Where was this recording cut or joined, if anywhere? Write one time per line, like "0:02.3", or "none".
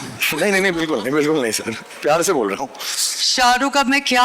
none